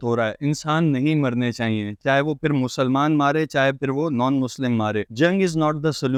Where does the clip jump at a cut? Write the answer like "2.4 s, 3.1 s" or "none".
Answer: none